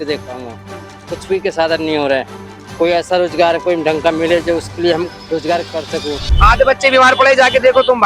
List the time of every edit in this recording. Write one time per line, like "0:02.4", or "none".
0:05.2
0:06.3